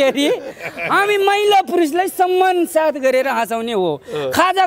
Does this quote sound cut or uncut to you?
uncut